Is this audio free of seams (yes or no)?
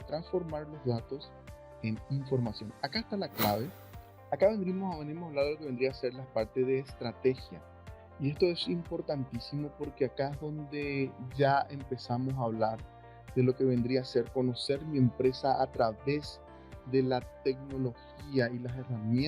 no